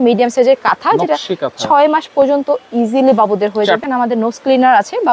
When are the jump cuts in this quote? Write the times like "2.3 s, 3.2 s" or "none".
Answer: 3.8 s

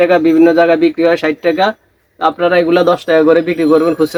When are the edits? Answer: none

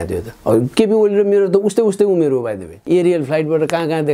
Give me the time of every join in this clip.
2.7 s

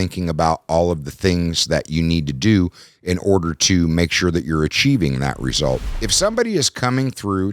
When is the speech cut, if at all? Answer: 5.9 s

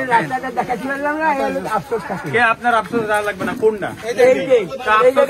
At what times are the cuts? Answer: none

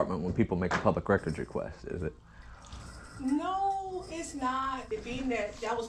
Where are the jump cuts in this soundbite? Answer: 4.9 s

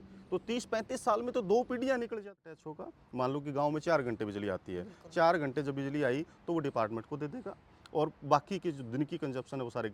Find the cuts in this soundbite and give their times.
2.3 s

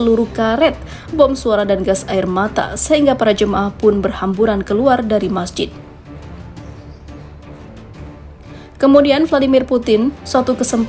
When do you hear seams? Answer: 5.7 s, 8.8 s

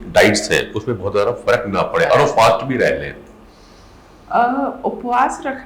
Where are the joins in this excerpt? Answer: none

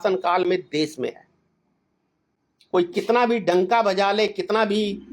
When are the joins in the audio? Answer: none

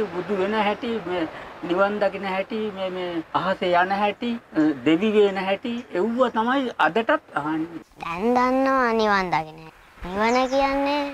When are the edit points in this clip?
3.3 s, 4.4 s, 7.6 s, 9.7 s

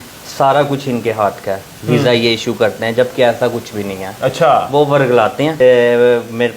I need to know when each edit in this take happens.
5.5 s

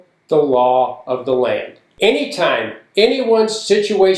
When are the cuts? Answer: 1.8 s

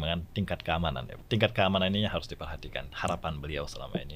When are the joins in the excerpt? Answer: 1.1 s

